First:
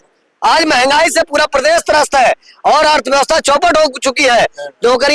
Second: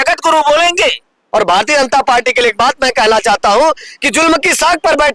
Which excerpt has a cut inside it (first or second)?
second